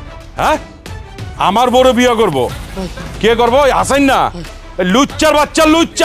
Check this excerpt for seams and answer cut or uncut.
cut